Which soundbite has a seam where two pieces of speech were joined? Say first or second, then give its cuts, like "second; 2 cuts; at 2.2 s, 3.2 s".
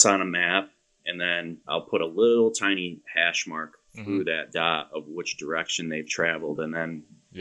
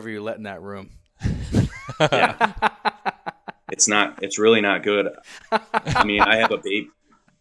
first; 1 cut; at 1.6 s